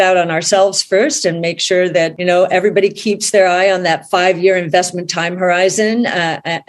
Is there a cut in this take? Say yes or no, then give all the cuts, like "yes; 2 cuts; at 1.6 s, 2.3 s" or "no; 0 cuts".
yes; 1 cut; at 2.1 s